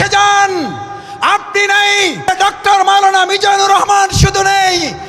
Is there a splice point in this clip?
yes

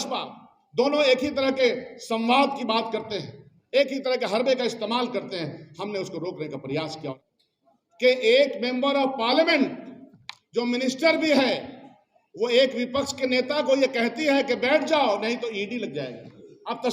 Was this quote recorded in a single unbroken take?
no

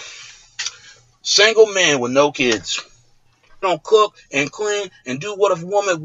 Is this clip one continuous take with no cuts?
yes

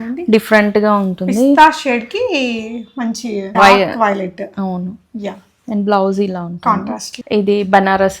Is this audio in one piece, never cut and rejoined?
no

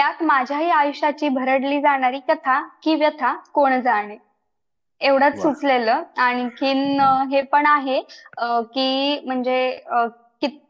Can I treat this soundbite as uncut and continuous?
yes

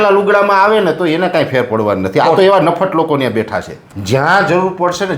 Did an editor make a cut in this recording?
yes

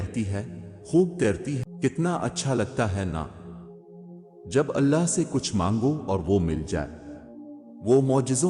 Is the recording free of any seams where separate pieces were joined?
no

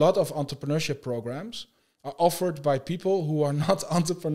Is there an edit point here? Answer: no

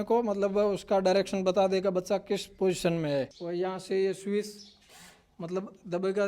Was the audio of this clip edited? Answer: yes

